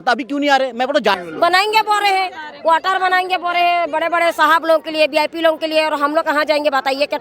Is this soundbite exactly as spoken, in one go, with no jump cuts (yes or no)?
no